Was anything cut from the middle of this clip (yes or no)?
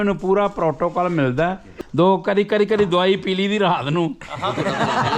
yes